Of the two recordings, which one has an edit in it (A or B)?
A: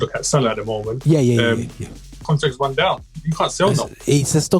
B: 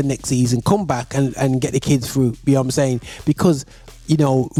A